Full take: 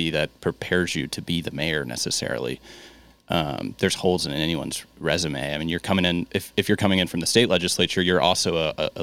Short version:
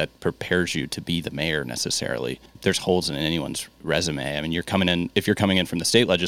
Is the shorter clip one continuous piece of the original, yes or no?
no